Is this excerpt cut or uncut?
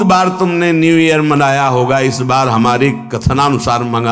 uncut